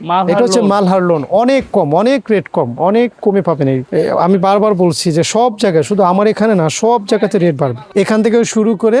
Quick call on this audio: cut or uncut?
cut